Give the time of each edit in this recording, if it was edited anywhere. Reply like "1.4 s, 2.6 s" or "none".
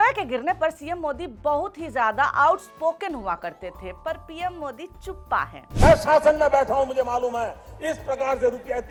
none